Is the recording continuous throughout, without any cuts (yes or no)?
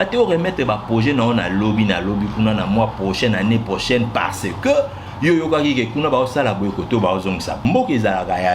no